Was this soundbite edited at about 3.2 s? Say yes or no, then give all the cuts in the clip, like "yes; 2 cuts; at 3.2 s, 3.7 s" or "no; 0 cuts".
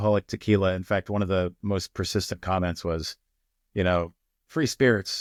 no; 0 cuts